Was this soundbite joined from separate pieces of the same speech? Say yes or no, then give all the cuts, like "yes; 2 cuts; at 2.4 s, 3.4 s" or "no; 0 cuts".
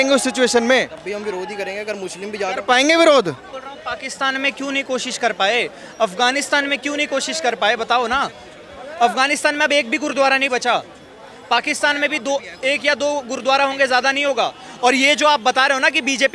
yes; 1 cut; at 3.5 s